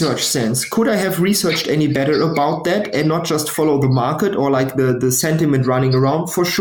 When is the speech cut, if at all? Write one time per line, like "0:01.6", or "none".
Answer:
none